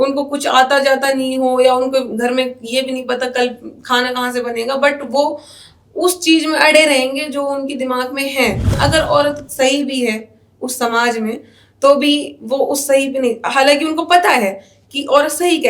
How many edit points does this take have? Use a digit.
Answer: 1